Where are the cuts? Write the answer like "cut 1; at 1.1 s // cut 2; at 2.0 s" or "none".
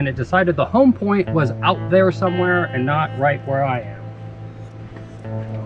none